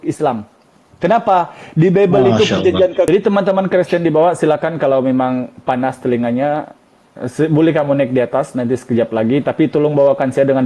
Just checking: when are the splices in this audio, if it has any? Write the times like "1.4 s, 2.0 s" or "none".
3.1 s

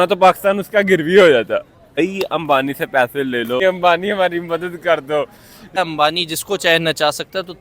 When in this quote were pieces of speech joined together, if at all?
2.0 s, 3.6 s, 5.8 s

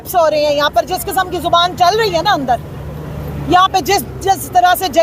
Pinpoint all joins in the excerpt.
none

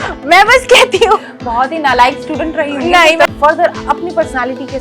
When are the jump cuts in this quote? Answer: 3.3 s

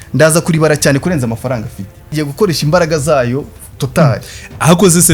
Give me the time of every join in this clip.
2.1 s

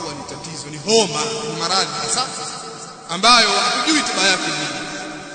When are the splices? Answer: none

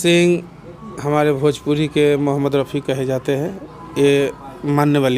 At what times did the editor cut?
none

